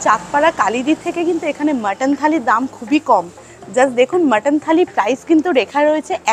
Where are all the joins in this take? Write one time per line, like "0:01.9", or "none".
none